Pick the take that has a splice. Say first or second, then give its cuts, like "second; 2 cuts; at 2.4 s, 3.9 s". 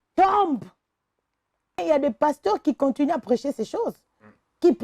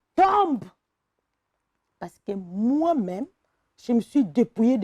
first; 1 cut; at 1.8 s